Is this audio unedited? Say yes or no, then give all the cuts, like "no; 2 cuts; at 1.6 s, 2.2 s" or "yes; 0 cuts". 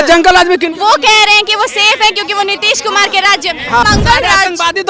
no; 1 cut; at 3.8 s